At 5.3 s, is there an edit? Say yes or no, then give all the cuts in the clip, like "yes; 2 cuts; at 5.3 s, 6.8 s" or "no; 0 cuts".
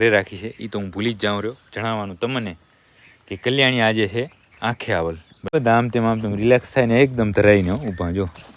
yes; 1 cut; at 5.3 s